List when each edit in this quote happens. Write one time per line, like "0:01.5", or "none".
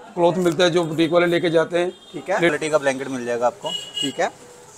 0:02.5